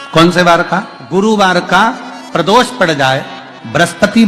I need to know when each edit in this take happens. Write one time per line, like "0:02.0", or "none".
0:01.2